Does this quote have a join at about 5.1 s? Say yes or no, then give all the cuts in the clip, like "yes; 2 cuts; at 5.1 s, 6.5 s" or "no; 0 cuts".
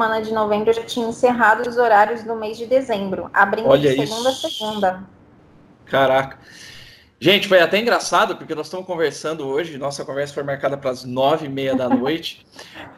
no; 0 cuts